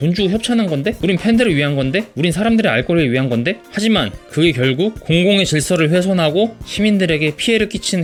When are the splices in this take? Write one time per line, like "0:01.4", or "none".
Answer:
none